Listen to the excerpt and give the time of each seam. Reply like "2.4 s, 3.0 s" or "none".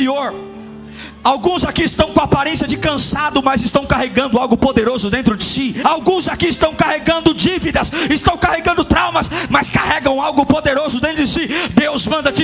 5.8 s